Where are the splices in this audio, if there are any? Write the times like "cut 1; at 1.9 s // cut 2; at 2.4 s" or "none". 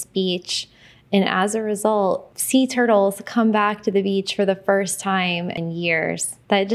cut 1; at 2.3 s // cut 2; at 5.8 s